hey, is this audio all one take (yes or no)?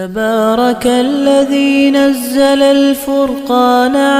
yes